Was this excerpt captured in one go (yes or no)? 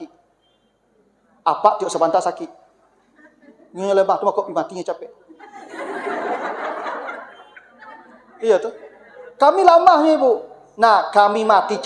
yes